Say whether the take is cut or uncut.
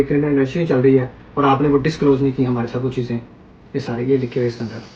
uncut